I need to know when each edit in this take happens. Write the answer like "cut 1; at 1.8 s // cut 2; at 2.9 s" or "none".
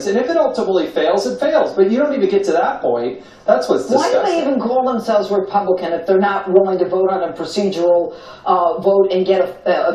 none